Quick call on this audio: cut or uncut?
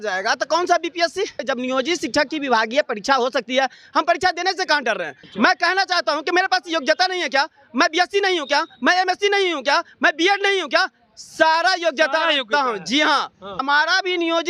cut